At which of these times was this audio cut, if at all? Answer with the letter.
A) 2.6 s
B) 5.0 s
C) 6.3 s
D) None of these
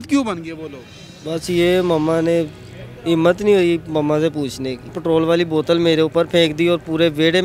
B